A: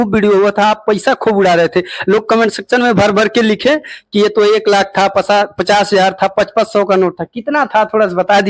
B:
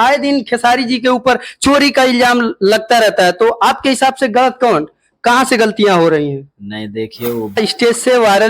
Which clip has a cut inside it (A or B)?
B